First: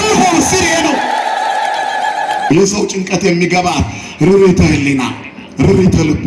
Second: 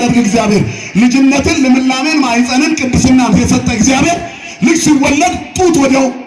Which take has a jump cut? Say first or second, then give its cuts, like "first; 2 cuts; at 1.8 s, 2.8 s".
first; 1 cut; at 2.5 s